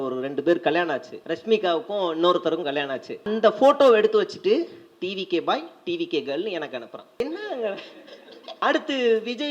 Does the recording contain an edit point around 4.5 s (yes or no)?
no